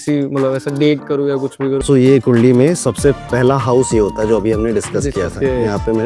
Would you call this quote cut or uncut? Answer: cut